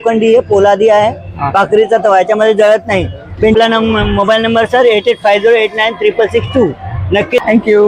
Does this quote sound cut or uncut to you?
uncut